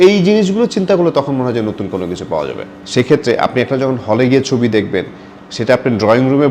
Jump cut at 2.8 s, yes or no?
yes